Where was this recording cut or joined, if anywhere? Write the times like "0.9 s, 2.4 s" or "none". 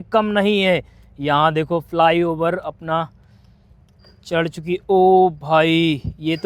none